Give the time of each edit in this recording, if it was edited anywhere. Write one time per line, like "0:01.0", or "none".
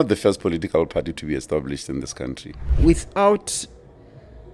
0:02.7